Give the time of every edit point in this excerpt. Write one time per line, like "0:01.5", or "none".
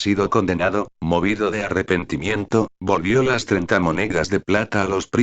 0:02.9